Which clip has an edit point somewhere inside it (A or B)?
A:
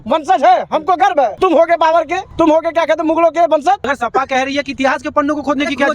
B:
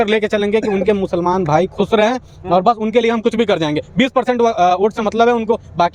A